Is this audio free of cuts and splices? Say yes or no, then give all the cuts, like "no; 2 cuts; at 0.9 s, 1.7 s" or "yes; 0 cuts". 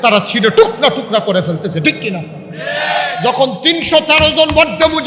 no; 1 cut; at 3.1 s